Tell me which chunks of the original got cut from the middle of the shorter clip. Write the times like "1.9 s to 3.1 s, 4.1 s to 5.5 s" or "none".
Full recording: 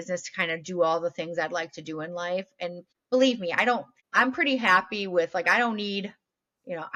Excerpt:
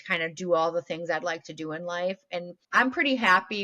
2.8 s to 4.0 s